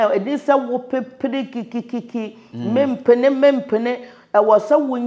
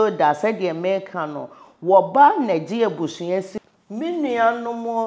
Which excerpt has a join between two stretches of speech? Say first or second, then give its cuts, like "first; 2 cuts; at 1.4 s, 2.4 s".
second; 1 cut; at 3.5 s